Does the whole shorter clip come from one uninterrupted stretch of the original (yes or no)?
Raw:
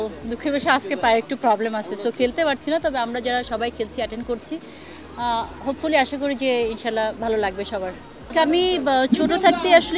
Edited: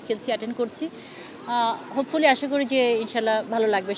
yes